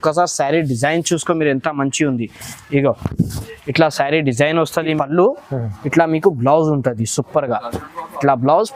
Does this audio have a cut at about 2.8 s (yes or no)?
no